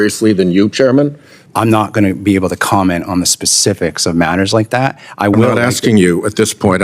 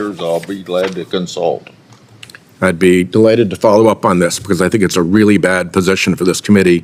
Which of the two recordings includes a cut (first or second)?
first